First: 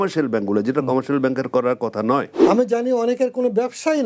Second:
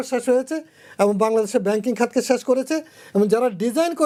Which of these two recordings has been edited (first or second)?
first